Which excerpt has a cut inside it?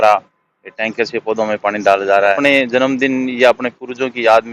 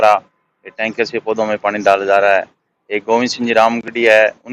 first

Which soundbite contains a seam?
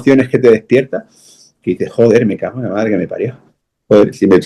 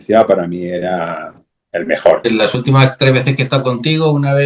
second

